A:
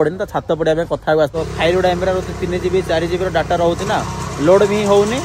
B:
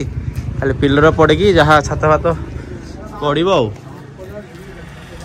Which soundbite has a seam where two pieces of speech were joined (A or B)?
A